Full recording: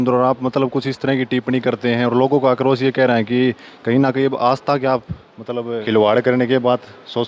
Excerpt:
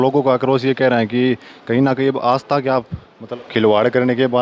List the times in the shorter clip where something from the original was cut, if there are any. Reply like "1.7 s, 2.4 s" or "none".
3.4 s

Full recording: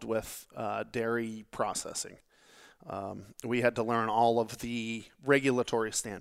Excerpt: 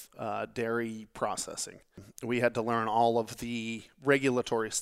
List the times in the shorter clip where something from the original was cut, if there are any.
2.1 s

